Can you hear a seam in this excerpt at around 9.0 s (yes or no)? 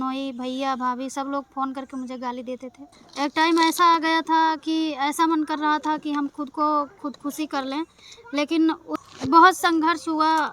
yes